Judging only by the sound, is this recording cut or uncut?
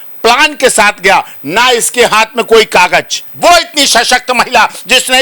cut